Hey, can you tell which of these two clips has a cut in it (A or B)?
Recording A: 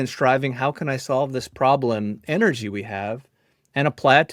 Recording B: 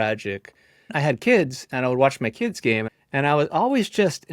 B